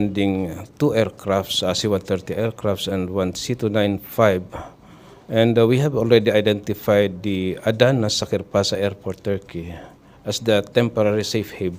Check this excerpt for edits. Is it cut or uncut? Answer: uncut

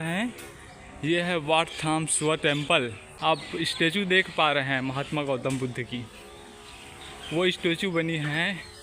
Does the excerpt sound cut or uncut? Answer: uncut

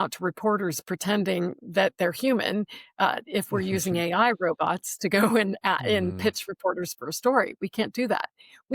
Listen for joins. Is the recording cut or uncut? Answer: uncut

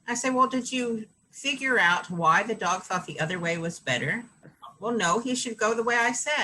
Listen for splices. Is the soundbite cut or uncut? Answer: cut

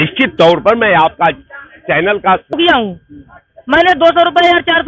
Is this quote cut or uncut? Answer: cut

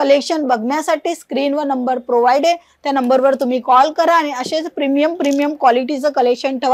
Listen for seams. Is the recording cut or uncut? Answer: uncut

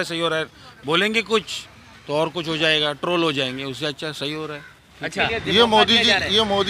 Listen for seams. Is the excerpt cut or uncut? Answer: cut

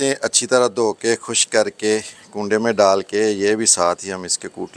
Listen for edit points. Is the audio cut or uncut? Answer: uncut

